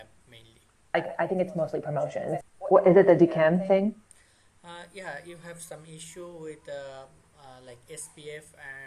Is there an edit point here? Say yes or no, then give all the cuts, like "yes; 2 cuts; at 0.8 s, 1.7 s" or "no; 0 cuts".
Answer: yes; 1 cut; at 2.4 s